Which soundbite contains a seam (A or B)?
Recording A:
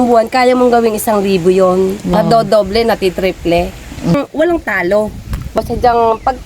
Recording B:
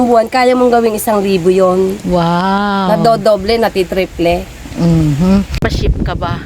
A